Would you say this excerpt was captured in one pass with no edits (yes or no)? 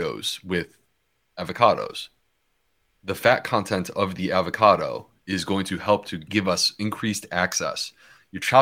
no